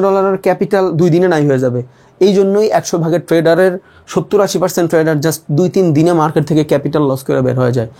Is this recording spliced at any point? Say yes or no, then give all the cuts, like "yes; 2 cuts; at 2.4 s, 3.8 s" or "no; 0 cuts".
no; 0 cuts